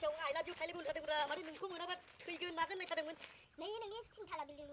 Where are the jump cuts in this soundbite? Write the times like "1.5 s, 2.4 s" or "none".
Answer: 3.5 s

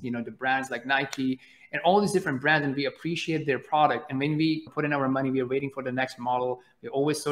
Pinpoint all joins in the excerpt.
4.7 s

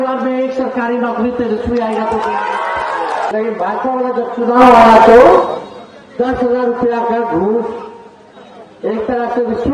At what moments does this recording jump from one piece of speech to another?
3.3 s

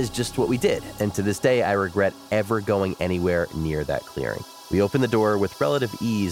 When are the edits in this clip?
4.5 s

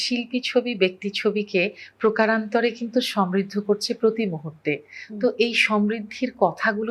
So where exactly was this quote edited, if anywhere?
none

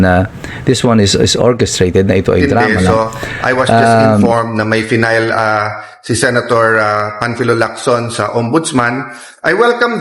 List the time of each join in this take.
4.3 s

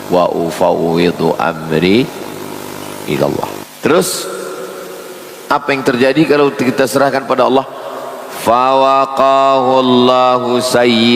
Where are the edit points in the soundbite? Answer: 3.6 s

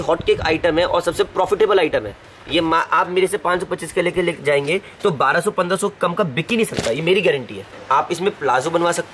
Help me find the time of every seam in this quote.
7.7 s

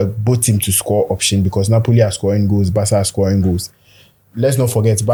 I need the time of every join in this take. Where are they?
none

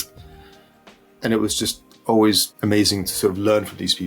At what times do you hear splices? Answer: 1.9 s, 2.5 s

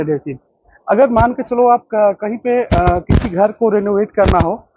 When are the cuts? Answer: none

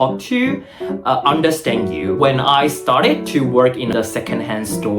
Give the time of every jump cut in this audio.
2.1 s, 3.9 s

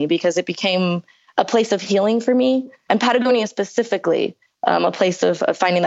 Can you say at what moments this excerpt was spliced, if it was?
2.8 s, 4.4 s

